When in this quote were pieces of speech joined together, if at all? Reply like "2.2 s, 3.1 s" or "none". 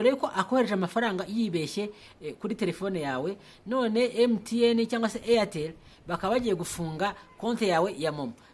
none